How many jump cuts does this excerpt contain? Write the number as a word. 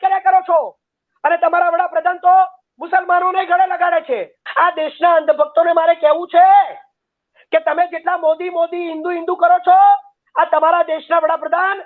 one